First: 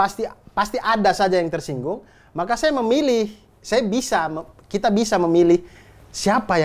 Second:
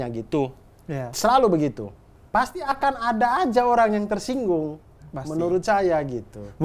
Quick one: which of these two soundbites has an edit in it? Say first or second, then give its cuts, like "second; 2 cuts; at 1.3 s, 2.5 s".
second; 1 cut; at 2.1 s